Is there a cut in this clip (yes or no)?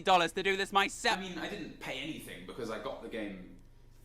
yes